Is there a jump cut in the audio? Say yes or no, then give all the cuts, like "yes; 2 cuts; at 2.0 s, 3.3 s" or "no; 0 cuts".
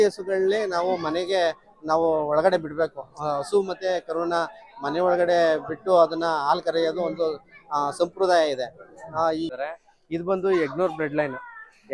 yes; 1 cut; at 9.5 s